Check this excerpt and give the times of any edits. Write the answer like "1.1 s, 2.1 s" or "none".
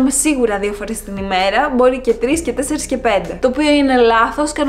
none